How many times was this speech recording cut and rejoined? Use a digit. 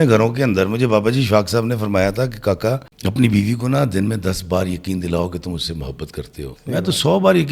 2